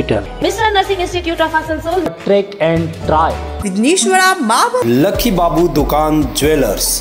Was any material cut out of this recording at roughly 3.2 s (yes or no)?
no